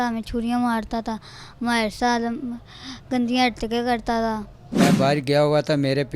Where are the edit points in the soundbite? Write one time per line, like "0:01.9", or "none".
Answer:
0:04.8